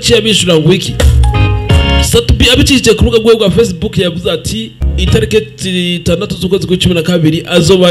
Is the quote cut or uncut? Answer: cut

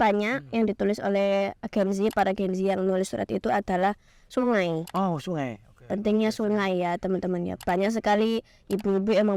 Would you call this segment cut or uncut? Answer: uncut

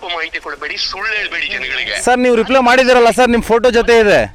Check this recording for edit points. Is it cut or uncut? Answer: uncut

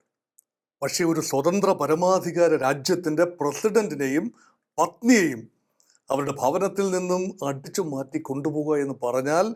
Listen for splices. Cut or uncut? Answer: uncut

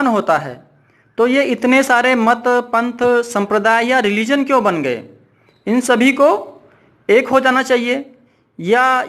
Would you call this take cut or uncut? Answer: uncut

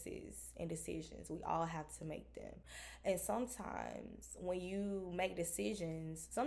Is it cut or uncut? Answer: uncut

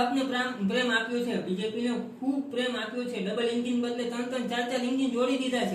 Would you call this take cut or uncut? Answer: uncut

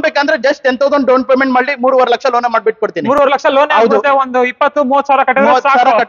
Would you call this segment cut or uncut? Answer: uncut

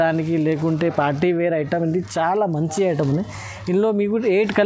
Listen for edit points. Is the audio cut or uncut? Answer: uncut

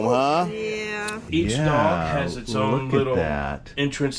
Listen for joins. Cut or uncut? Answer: cut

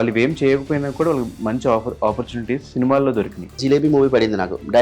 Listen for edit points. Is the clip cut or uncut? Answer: cut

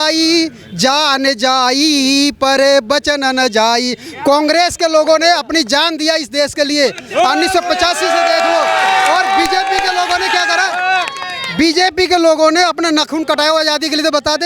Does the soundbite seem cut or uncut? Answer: uncut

